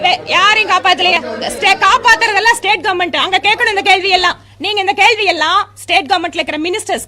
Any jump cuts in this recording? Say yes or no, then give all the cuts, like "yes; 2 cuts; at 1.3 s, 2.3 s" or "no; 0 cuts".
yes; 1 cut; at 1.1 s